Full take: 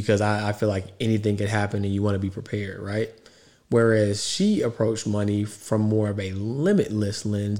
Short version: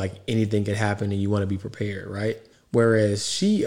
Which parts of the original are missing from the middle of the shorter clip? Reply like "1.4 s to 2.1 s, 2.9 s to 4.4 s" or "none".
3.2 s to 3.5 s